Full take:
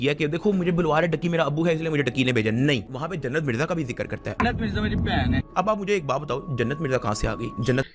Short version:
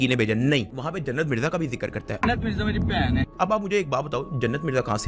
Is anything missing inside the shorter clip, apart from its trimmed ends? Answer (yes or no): no